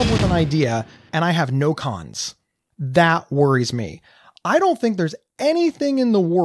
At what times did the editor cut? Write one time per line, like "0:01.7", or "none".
0:01.0